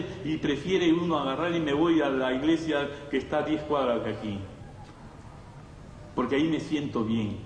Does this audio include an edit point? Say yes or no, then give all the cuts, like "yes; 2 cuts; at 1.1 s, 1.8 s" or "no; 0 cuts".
no; 0 cuts